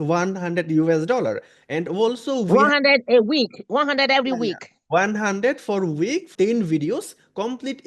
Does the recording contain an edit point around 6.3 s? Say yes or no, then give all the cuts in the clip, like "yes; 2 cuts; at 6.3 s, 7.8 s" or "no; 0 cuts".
yes; 1 cut; at 6.3 s